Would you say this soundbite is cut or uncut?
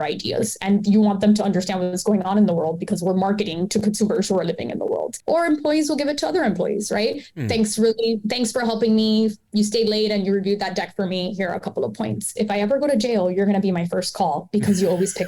cut